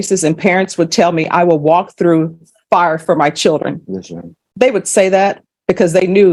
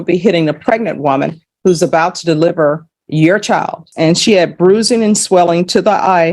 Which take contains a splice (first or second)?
second